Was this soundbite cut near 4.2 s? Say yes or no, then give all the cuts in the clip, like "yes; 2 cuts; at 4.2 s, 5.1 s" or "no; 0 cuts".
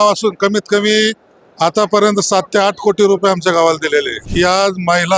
yes; 1 cut; at 4.2 s